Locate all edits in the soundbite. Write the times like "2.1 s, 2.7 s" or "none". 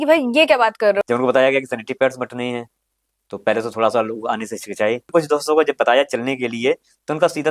1.0 s, 5.1 s